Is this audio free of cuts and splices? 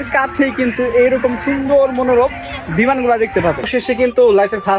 no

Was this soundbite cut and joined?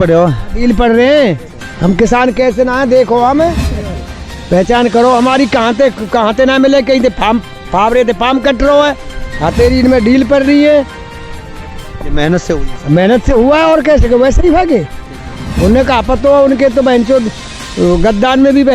no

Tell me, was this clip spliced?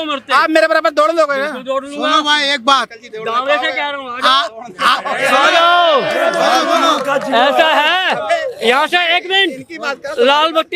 no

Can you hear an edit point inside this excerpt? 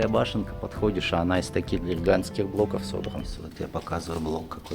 yes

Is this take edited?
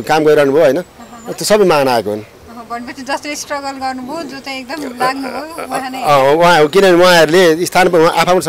no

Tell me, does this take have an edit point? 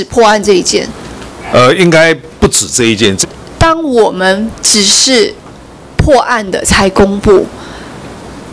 yes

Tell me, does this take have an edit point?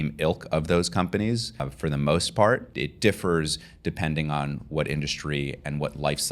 yes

